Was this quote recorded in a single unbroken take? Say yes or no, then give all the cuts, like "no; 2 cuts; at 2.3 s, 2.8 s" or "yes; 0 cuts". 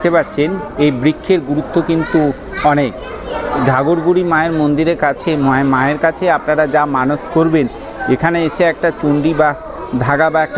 yes; 0 cuts